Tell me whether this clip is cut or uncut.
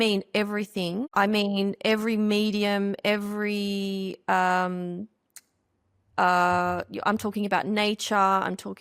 cut